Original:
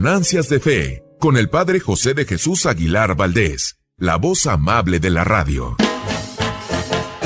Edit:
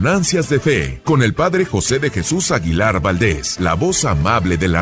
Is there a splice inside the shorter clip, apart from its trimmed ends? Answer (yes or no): yes